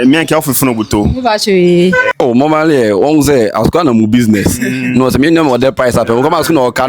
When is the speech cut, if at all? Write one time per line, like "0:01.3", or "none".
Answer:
0:02.1